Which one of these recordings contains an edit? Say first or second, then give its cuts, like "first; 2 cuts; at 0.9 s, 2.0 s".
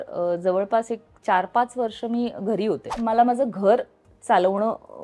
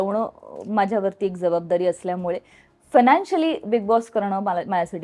first; 1 cut; at 2.9 s